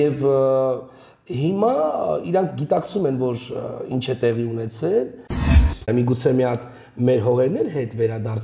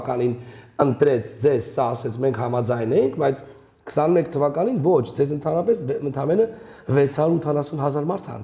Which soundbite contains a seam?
first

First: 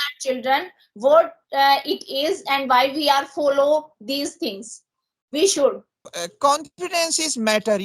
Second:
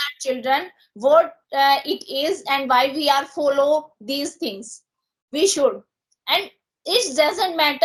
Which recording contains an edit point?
first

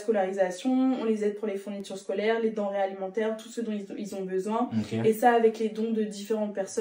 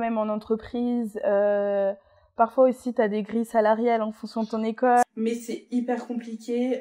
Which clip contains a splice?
second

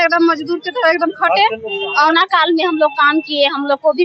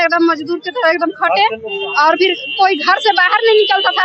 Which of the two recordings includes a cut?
first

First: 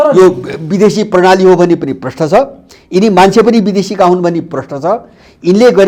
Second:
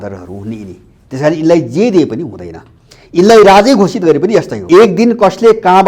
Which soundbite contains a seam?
second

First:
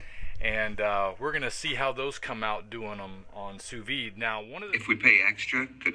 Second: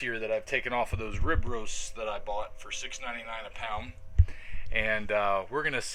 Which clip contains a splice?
first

